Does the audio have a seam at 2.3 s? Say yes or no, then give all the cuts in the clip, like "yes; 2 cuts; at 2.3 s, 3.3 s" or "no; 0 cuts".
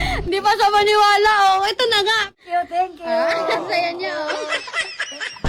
yes; 1 cut; at 2.3 s